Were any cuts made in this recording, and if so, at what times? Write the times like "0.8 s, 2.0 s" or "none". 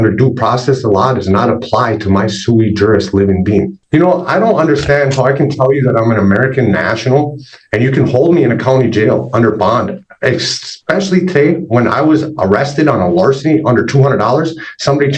3.7 s